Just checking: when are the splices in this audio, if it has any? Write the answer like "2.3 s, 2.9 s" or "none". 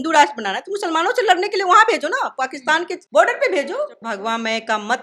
3.0 s, 4.0 s